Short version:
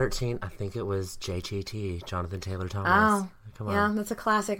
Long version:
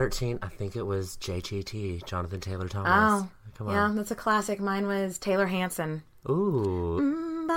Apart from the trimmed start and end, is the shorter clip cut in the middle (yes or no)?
no